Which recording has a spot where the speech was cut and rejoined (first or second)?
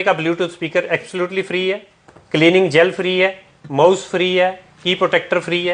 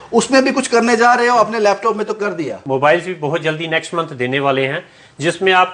second